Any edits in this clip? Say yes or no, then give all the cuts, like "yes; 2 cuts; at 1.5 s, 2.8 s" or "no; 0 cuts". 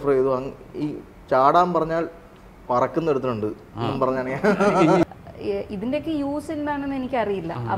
yes; 1 cut; at 5.0 s